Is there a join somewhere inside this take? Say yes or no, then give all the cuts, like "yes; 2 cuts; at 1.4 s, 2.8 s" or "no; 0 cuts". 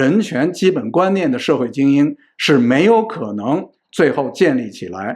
no; 0 cuts